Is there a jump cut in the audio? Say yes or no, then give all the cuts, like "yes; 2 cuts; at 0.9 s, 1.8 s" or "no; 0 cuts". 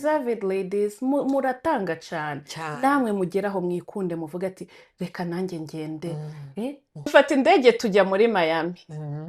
yes; 1 cut; at 6.9 s